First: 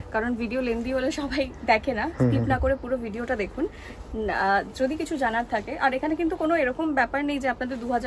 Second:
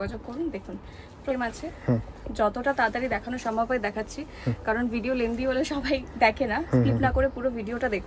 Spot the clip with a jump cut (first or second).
second